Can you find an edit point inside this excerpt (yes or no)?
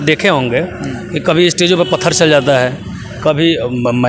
no